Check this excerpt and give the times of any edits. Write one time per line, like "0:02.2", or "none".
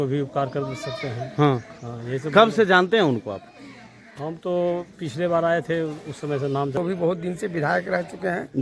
0:06.8

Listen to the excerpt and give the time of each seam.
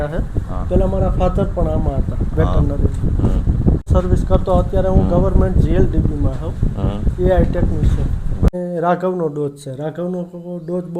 0:03.8
0:08.5

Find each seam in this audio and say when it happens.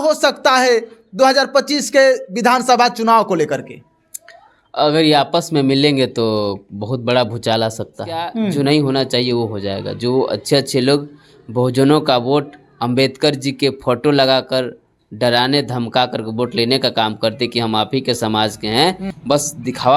0:08.5
0:19.1

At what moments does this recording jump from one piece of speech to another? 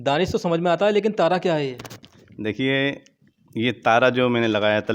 none

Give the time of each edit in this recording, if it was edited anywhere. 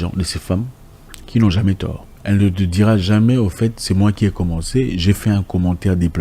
0:02.1

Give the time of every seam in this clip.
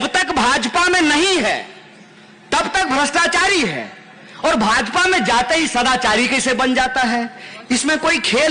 none

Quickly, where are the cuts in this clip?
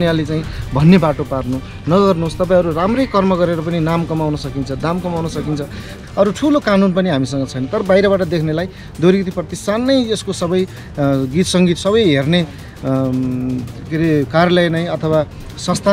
0:06.0

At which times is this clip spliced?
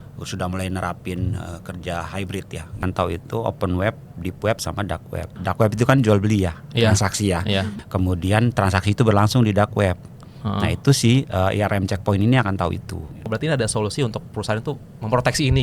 0:02.8
0:05.3
0:07.8
0:13.2

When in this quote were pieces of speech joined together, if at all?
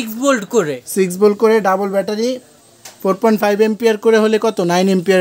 none

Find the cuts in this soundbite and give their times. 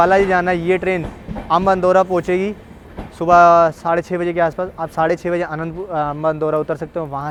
none

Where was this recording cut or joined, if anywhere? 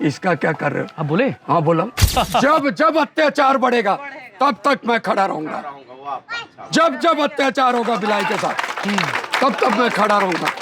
0:02.0

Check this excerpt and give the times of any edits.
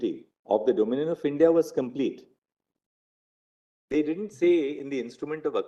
none

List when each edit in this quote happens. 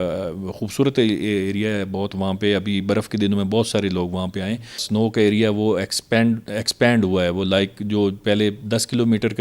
0:04.8

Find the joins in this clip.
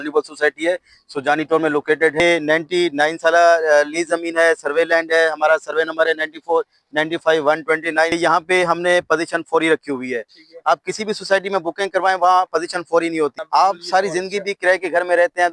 0:02.2
0:08.1
0:13.4

